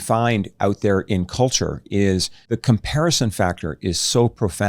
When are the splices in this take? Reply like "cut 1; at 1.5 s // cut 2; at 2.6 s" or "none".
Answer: cut 1; at 2.3 s